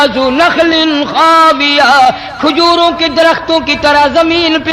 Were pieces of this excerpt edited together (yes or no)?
no